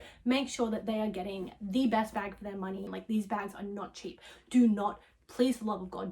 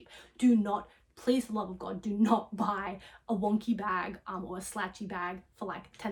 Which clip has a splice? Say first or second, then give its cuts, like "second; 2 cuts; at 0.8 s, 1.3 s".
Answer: first; 1 cut; at 2.9 s